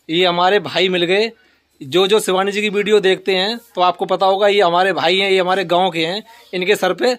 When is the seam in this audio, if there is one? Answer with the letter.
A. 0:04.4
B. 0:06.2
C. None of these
C